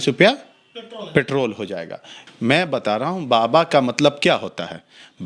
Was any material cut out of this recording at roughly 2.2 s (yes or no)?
yes